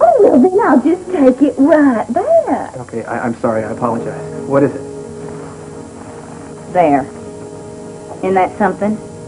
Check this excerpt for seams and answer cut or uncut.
uncut